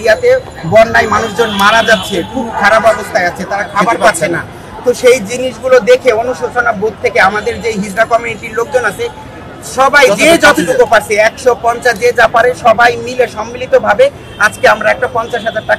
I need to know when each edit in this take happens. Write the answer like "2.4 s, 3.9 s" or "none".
none